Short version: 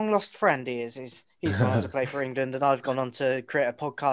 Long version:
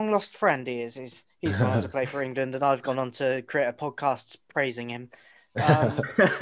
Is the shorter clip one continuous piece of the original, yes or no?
yes